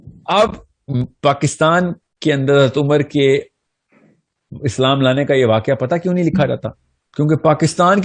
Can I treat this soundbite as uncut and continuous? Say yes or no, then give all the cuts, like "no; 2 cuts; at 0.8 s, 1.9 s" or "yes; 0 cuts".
no; 1 cut; at 1.1 s